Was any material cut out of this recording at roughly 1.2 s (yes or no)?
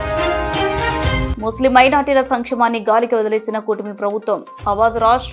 yes